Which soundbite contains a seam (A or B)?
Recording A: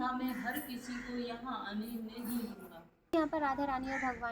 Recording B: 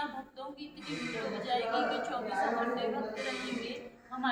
A